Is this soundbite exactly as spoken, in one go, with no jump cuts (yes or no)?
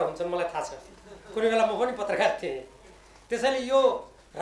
yes